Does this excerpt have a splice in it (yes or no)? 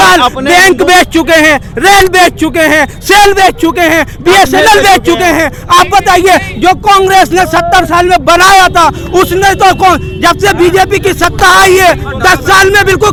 no